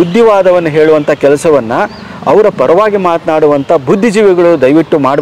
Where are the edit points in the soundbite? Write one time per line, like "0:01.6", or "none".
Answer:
none